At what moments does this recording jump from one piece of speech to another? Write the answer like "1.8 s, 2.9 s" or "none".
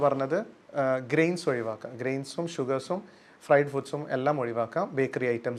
none